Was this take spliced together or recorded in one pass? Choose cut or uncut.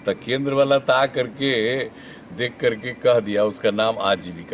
uncut